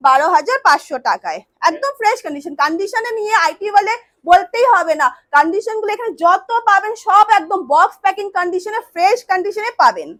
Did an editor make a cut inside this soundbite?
no; 0 cuts

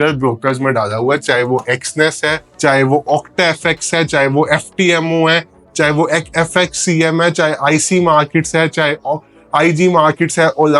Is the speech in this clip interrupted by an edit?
no; 0 cuts

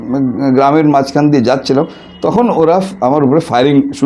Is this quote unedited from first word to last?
yes; 0 cuts

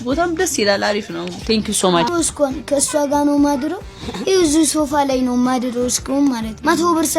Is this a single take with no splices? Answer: no; 1 cut; at 2.1 s

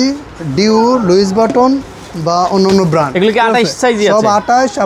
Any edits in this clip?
no; 0 cuts

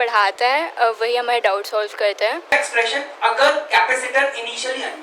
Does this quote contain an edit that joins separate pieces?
yes; 1 cut; at 2.5 s

